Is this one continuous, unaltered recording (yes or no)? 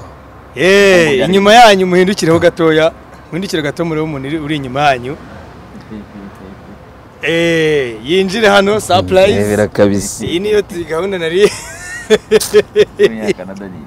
yes